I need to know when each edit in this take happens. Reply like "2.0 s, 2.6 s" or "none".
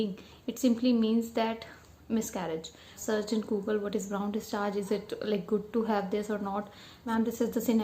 3.0 s, 7.1 s